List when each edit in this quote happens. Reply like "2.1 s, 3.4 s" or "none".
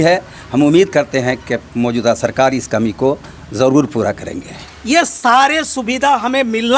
4.5 s